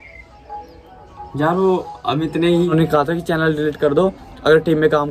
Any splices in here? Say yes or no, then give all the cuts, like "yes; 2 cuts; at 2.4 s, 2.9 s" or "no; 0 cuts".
yes; 1 cut; at 2.7 s